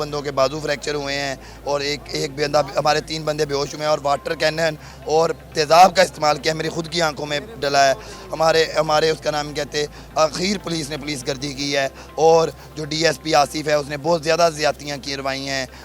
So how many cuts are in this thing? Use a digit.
0